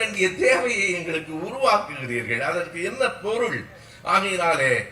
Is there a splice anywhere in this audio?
no; 0 cuts

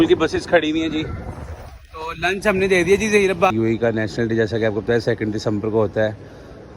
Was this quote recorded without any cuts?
no; 1 cut; at 3.5 s

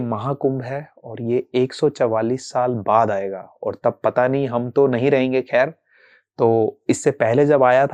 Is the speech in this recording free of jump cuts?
yes; 0 cuts

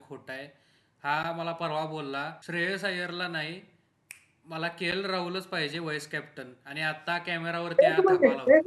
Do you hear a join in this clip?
yes; 1 cut; at 2.4 s

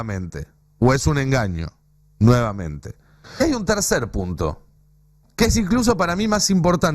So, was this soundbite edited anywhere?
yes; 1 cut; at 3.4 s

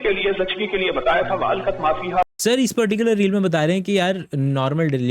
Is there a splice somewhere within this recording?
no; 0 cuts

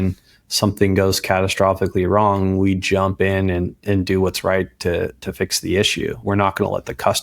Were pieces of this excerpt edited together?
yes; 1 cut; at 6.2 s

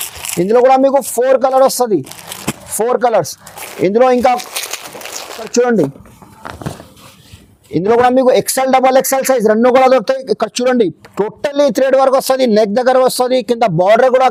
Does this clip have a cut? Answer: no; 0 cuts

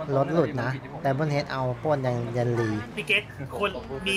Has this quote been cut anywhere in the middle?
yes; 1 cut; at 2.9 s

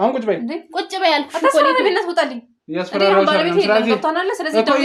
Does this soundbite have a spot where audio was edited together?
no; 0 cuts

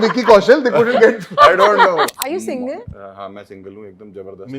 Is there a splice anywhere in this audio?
yes; 1 cut; at 2.1 s

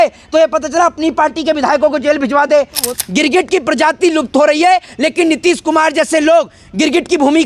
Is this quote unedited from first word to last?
no; 1 cut; at 2.9 s

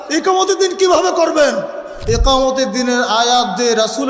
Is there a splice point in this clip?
yes; 1 cut; at 1.9 s

